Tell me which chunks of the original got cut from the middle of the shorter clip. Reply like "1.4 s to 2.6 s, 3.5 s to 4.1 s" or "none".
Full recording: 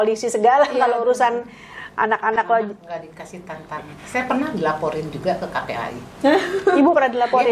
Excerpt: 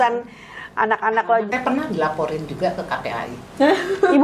2.7 s to 4.1 s